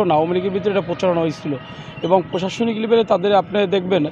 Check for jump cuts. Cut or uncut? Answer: uncut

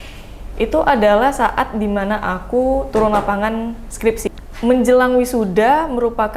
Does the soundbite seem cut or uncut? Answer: cut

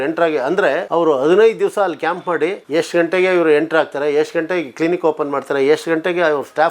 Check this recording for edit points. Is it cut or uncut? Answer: cut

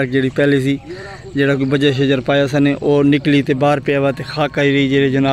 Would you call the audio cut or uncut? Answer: uncut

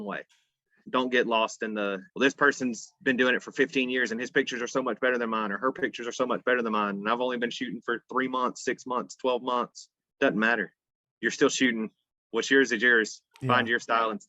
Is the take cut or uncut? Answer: cut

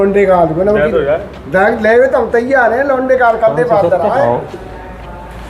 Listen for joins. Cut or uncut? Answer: uncut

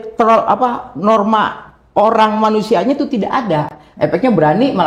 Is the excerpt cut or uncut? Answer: uncut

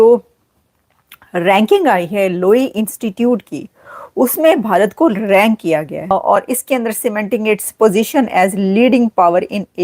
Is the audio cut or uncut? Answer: cut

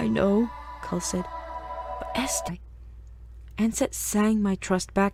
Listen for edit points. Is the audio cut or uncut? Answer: uncut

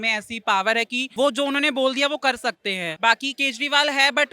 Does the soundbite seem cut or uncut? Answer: cut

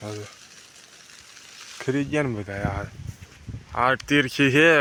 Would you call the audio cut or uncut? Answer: uncut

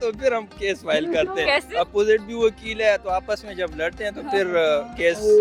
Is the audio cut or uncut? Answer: uncut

